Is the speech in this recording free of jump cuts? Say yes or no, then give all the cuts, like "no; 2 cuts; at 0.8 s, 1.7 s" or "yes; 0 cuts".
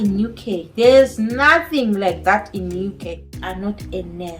no; 1 cut; at 3.5 s